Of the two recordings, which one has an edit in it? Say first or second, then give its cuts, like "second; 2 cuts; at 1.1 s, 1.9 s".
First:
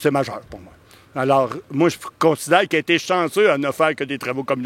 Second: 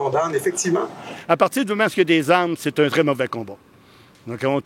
second; 1 cut; at 1.1 s